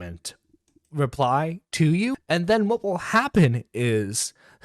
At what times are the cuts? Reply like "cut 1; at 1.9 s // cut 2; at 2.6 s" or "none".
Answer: cut 1; at 2.2 s